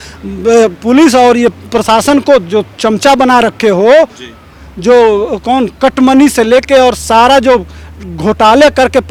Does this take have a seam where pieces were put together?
no; 0 cuts

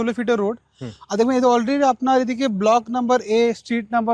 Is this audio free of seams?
yes; 0 cuts

